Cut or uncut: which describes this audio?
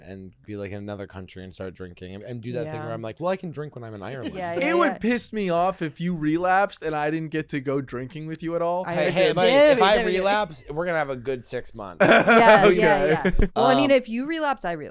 cut